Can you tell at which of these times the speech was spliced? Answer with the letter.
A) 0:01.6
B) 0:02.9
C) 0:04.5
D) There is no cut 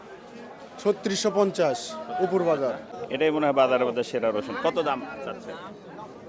B